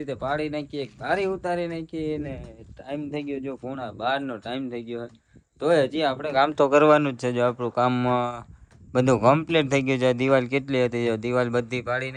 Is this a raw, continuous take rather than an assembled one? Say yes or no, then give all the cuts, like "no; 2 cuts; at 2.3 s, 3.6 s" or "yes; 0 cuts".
yes; 0 cuts